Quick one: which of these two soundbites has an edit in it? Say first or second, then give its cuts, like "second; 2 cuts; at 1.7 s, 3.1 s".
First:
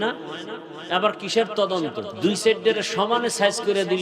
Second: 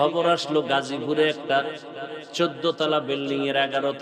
first; 1 cut; at 2.1 s